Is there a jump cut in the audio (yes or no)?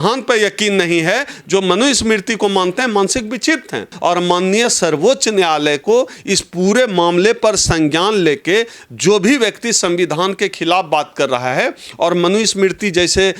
yes